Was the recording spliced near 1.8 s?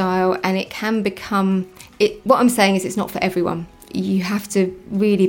no; 1 cut; at 3.7 s

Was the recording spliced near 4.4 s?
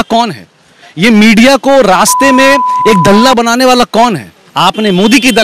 yes; 1 cut; at 4.4 s

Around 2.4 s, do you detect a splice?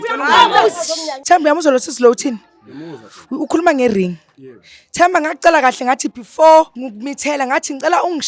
no; 2 cuts; at 1.1 s, 6.8 s

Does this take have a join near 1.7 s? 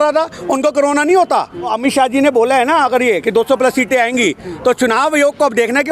yes; 1 cut; at 1.7 s

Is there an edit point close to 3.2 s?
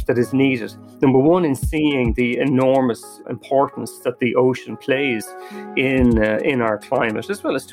yes; 1 cut; at 3.2 s

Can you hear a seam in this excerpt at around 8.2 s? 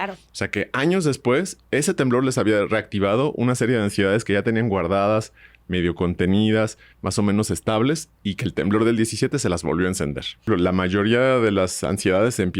no; 1 cut; at 10.4 s

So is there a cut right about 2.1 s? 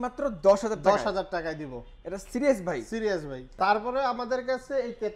no; 1 cut; at 3.4 s

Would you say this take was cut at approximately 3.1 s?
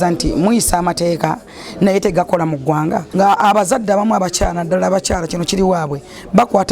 yes; 1 cut; at 3.1 s

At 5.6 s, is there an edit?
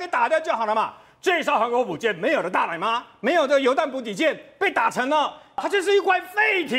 yes; 1 cut; at 5.6 s

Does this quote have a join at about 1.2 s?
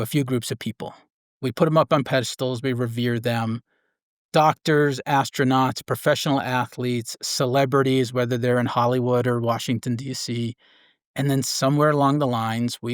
yes; 1 cut; at 1.2 s

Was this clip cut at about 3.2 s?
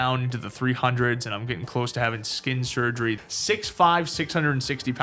yes; 1 cut; at 3.2 s

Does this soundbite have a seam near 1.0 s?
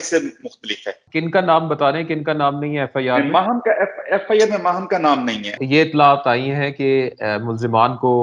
yes; 2 cuts; at 1.0 s, 5.6 s

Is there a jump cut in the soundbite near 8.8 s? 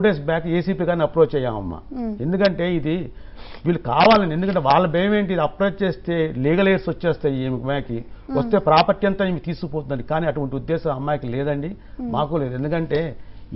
yes; 1 cut; at 8.8 s

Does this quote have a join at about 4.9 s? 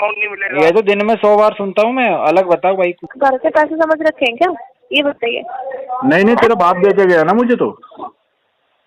no; 1 cut; at 3.0 s

